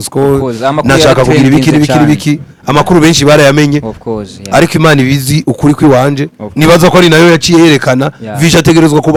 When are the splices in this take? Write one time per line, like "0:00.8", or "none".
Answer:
none

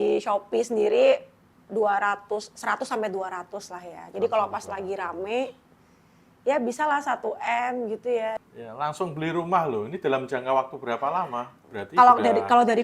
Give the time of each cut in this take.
0:08.4
0:11.6

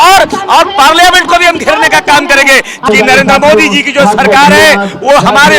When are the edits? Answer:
0:02.8

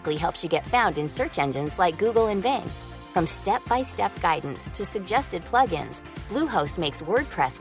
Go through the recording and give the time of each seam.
none

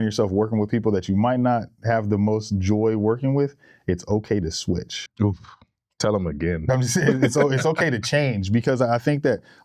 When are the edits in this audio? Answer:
none

